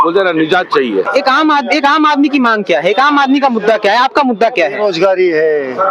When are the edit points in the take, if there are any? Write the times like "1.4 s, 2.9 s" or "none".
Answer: 1.1 s